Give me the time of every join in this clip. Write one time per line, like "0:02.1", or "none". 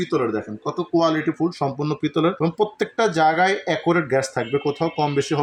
none

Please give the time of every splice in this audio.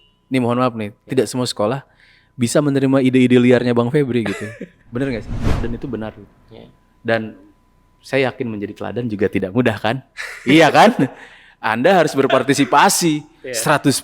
0:05.6

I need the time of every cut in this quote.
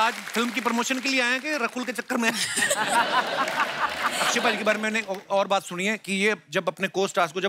0:04.1

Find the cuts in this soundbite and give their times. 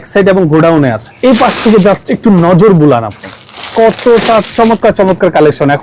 0:01.0

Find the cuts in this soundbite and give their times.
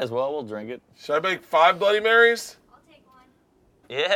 none

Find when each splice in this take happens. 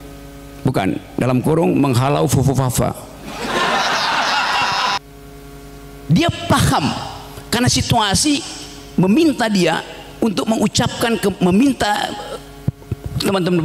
0:05.0

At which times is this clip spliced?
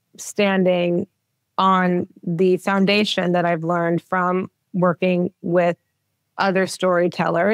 none

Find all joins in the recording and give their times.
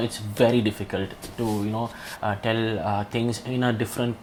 none

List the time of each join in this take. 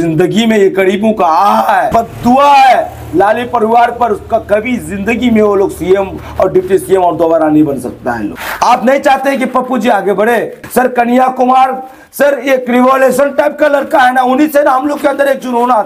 0:08.4
0:10.6

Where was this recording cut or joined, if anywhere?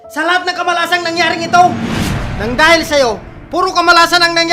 none

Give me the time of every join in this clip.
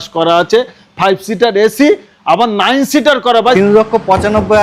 0:03.6

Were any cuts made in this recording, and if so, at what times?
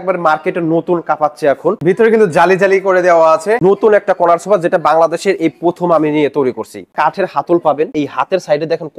0:01.8
0:03.6
0:06.9
0:07.9

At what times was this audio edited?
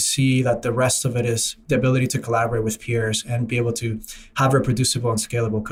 none

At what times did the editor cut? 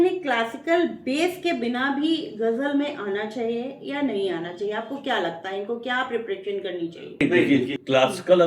0:07.2

